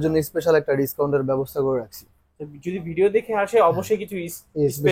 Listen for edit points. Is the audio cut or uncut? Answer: uncut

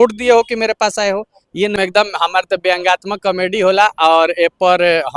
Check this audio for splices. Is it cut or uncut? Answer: cut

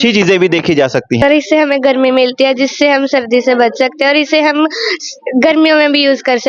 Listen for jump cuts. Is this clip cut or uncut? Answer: cut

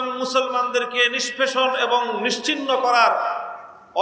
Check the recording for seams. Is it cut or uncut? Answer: uncut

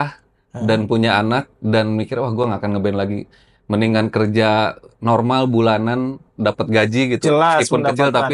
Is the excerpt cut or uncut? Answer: uncut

